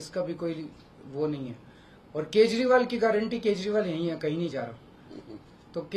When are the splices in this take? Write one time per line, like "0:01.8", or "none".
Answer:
none

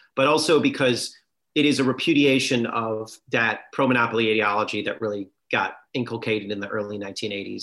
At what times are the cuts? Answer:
0:05.8

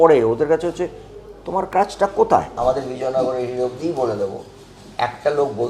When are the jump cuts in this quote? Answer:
0:02.5

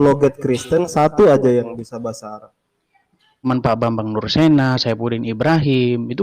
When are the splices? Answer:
0:03.4

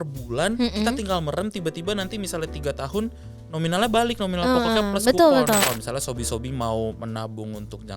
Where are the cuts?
0:05.6

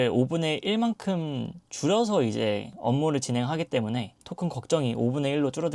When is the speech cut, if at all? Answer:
0:02.7

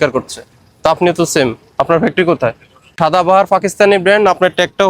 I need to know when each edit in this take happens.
0:02.9

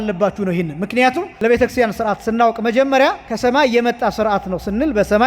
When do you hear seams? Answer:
0:01.3
0:03.3

